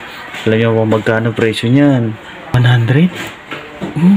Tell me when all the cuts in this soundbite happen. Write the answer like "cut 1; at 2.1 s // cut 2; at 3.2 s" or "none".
cut 1; at 2.6 s